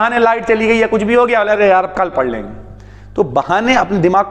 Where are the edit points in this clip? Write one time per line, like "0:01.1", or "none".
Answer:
none